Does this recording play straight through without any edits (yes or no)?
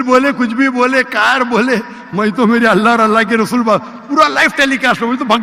yes